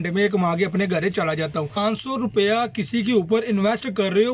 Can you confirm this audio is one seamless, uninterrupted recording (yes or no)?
no